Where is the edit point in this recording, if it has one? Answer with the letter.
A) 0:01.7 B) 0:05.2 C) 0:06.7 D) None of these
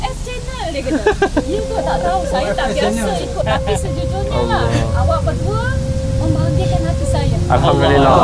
D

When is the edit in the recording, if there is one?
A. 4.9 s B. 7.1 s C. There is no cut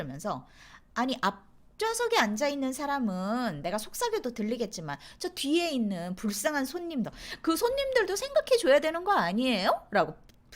B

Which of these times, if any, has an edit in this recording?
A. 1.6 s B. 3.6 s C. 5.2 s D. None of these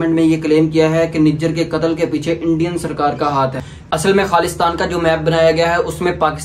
B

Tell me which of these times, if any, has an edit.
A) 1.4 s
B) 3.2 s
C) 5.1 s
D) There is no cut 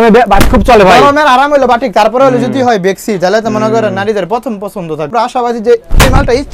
C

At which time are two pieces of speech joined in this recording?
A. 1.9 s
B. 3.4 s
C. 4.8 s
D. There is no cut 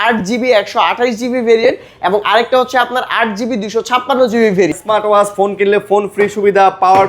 C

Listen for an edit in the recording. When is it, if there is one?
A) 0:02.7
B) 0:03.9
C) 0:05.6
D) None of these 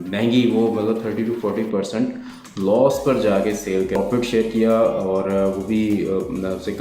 B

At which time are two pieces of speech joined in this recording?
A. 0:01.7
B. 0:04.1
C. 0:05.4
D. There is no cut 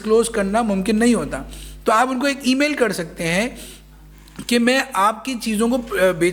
D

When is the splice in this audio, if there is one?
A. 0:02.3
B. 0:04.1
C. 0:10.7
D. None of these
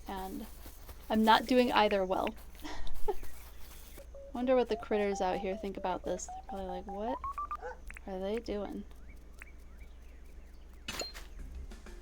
B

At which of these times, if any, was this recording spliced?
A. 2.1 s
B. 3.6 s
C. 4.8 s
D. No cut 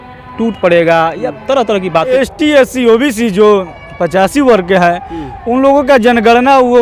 A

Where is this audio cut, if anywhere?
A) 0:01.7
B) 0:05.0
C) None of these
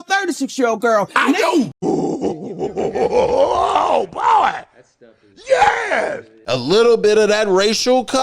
A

